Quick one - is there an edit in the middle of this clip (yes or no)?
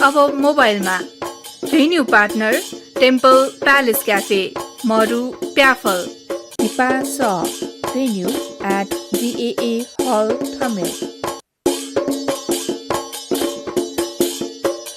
yes